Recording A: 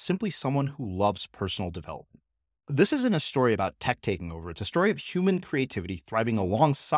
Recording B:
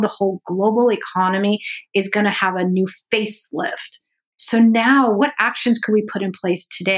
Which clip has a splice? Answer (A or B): B